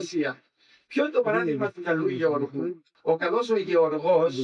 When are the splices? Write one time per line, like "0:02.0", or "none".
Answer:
0:02.9